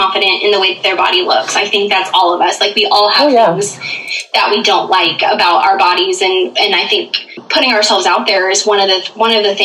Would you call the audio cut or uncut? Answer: cut